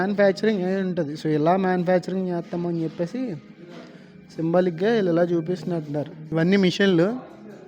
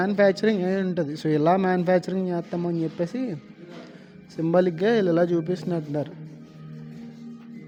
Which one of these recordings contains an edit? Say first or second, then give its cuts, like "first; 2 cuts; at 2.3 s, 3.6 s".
first; 1 cut; at 6.2 s